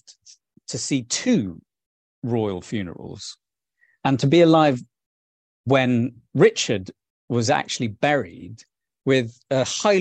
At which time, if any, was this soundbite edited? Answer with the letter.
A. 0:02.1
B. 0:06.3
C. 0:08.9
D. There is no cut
C